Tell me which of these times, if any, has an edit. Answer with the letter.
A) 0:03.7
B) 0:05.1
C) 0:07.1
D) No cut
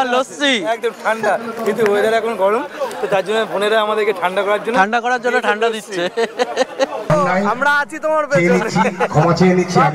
C